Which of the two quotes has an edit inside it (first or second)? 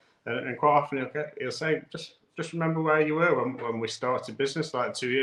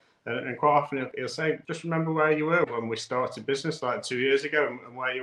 second